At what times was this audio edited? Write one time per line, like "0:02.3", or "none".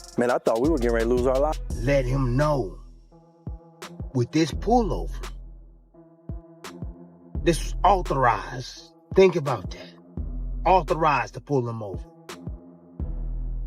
0:01.5